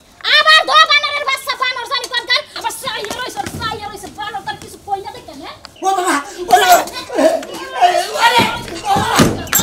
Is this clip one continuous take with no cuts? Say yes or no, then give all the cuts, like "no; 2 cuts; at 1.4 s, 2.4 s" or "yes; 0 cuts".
no; 2 cuts; at 2.5 s, 5.7 s